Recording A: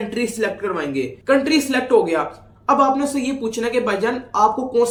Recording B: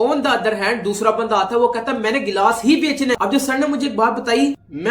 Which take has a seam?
B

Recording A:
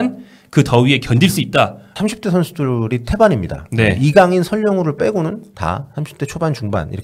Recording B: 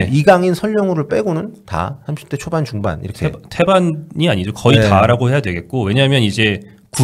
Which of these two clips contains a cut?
A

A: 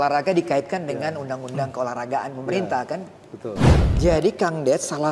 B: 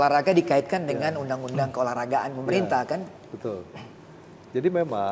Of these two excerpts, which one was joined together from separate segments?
A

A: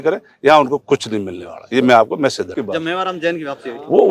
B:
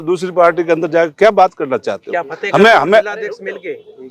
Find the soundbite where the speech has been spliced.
A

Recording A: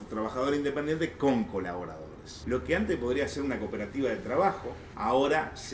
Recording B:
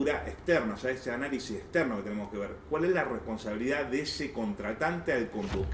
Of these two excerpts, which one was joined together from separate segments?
A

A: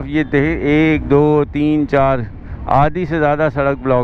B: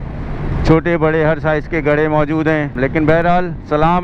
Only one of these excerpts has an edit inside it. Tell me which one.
B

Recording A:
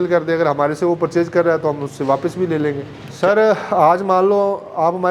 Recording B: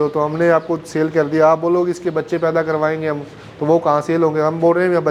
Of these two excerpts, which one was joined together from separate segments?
A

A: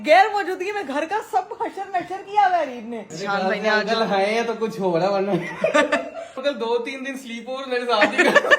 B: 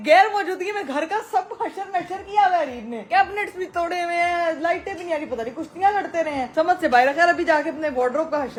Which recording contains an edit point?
A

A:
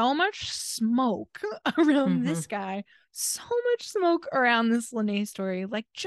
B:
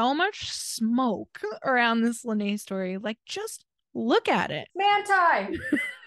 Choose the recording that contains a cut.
B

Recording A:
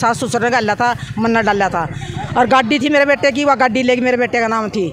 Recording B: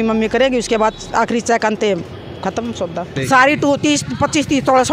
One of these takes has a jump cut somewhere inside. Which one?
B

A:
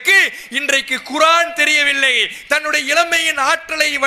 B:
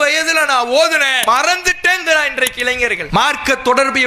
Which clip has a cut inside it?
B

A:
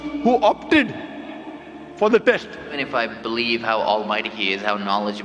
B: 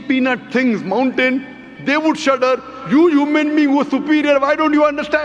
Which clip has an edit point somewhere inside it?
A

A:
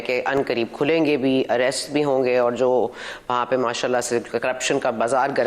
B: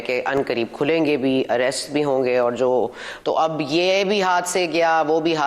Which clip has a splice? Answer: B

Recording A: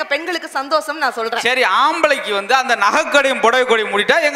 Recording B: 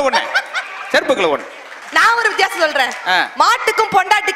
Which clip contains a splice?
B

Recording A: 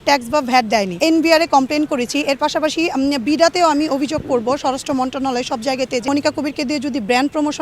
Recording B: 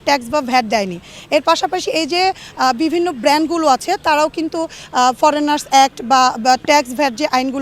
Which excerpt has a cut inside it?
A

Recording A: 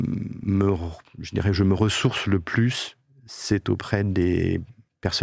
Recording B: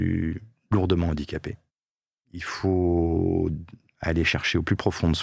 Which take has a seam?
B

